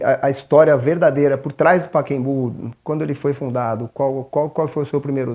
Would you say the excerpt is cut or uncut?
uncut